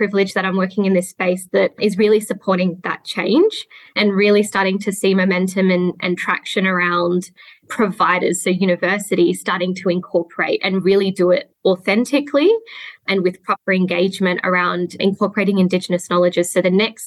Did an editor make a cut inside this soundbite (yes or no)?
yes